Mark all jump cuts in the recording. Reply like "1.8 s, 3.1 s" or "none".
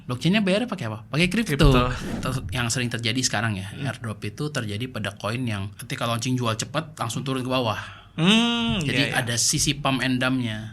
2.0 s, 5.8 s